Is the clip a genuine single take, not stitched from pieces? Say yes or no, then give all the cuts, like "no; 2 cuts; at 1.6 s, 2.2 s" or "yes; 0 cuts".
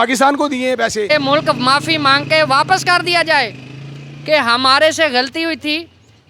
no; 1 cut; at 1.1 s